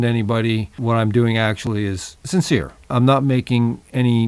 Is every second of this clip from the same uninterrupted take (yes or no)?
no